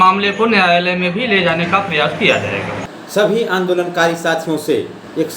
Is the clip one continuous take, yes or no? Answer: no